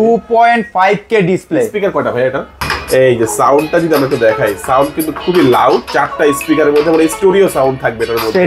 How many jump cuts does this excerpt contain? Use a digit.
1